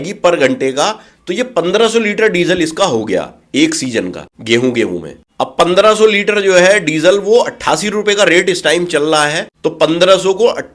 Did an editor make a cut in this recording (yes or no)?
no